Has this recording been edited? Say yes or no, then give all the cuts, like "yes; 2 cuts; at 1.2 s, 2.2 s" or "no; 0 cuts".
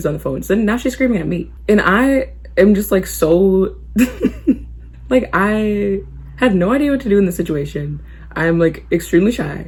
no; 0 cuts